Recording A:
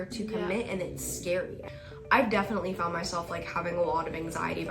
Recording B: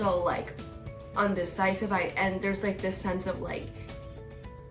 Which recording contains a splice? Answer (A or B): A